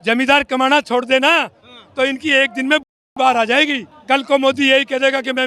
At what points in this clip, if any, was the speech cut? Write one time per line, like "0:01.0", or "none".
0:03.9

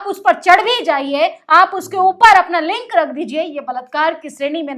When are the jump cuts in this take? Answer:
none

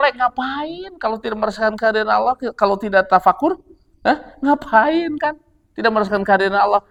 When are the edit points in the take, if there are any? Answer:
none

